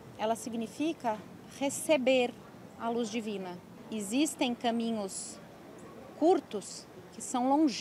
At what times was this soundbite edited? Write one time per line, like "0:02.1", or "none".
0:03.8